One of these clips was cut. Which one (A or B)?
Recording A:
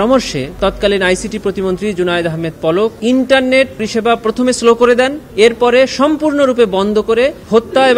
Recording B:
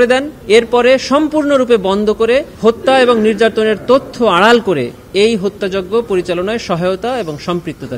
A